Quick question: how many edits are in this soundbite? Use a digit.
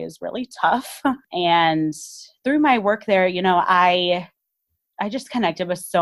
1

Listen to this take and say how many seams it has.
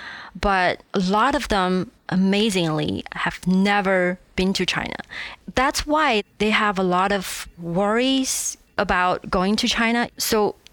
3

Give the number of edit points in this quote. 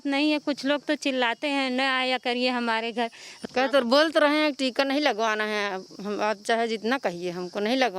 0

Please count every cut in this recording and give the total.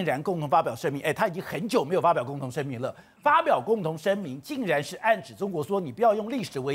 0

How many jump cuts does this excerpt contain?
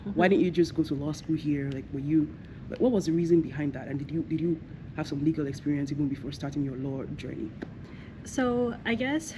0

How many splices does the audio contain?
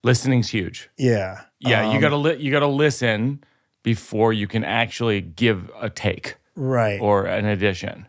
1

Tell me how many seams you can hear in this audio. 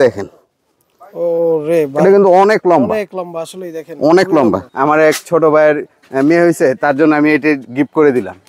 1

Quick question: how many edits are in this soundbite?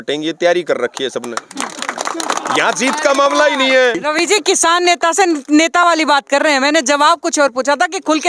1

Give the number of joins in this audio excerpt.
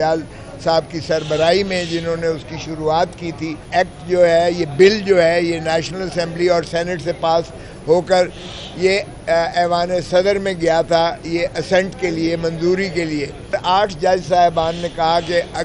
2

